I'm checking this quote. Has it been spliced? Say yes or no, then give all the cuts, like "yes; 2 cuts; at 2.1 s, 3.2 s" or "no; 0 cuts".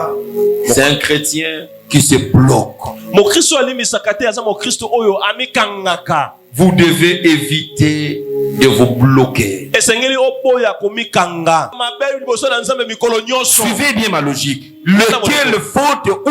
yes; 1 cut; at 11.8 s